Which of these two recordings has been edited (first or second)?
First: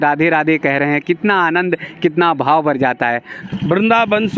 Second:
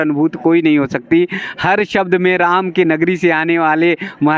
first